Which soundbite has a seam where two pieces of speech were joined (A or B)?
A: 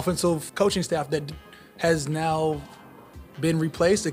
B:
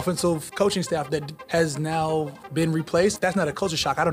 B